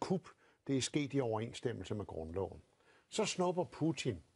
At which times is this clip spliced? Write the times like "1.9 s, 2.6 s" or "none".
2.9 s